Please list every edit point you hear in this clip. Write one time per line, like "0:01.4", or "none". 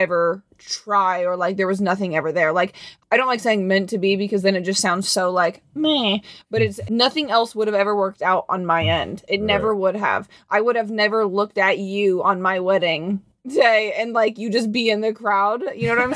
0:02.9
0:06.8